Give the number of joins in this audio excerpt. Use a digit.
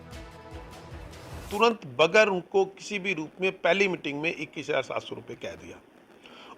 1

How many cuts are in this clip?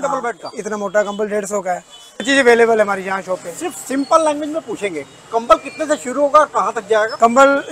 1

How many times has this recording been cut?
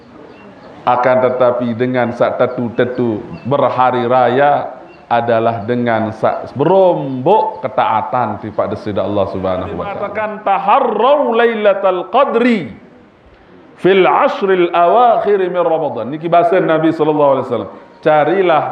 1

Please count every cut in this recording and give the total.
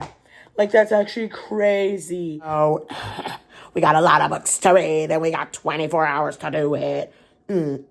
1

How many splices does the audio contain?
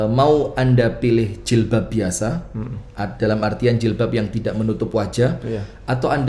0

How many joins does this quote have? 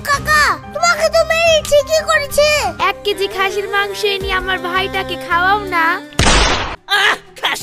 1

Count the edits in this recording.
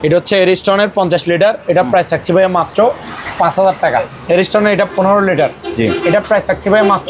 1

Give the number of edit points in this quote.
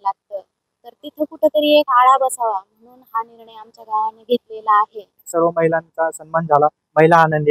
1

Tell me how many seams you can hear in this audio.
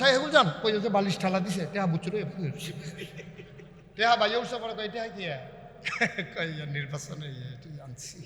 1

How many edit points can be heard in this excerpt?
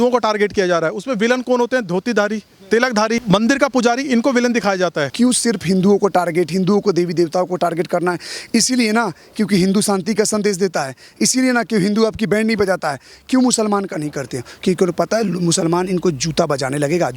2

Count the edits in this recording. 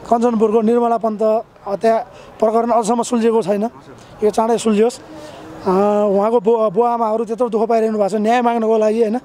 0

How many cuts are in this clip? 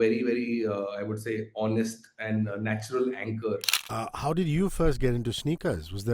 1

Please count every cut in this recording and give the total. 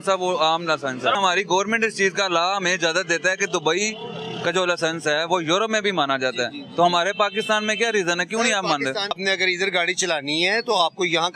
2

